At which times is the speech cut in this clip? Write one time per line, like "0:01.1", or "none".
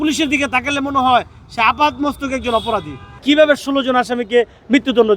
0:03.2